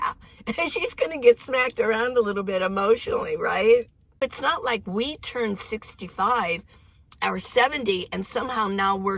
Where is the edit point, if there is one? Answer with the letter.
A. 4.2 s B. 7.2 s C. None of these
A